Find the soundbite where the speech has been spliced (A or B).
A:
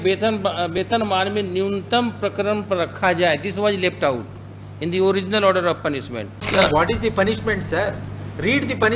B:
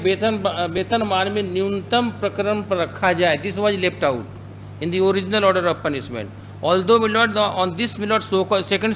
A